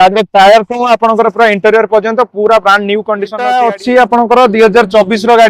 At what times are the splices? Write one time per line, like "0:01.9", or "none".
0:03.4